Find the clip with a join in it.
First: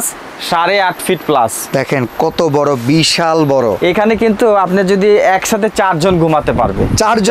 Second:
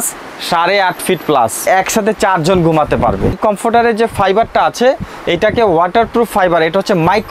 second; 2 cuts; at 1.7 s, 3.3 s

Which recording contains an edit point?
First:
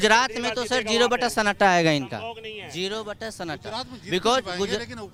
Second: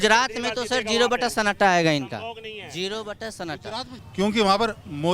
second; 1 cut; at 3.9 s

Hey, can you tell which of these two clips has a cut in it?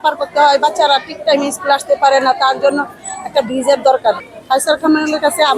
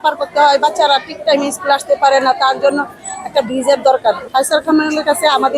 second; 1 cut; at 4.2 s

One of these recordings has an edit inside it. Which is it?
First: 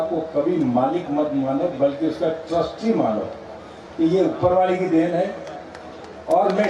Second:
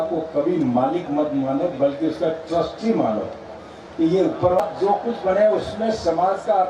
second; 1 cut; at 4.6 s

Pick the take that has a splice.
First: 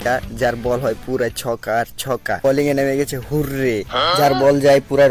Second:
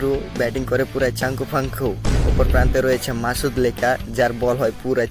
first; 1 cut; at 2.4 s

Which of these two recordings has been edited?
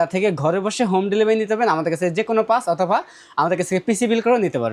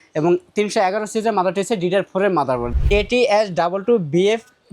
second; 1 cut; at 2.7 s

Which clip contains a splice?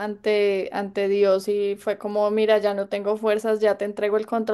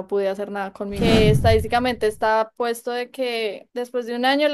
second; 2 cuts; at 1.0 s, 3.6 s

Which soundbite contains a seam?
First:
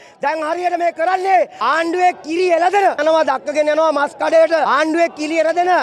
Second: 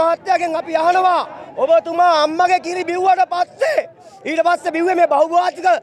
first; 3 cuts; at 1.6 s, 3.0 s, 4.7 s

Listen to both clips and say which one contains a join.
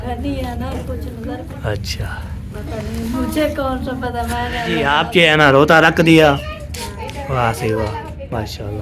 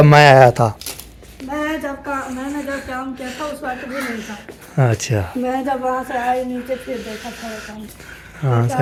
first; 2 cuts; at 1.4 s, 4.9 s

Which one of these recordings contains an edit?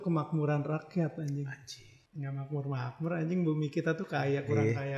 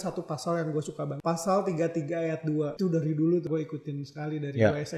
second; 3 cuts; at 1.2 s, 2.7 s, 3.5 s

